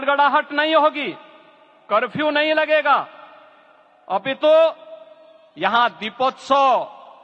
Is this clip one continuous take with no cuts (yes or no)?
yes